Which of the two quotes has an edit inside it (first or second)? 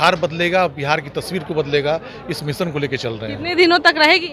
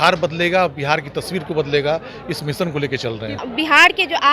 second